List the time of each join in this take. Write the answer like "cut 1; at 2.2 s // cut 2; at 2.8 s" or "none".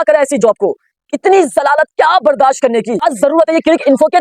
cut 1; at 3.0 s